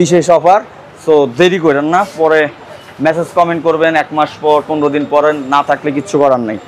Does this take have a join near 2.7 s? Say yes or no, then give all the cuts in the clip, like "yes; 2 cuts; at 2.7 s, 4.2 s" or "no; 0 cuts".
no; 0 cuts